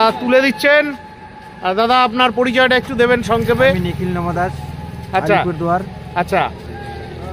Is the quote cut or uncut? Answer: uncut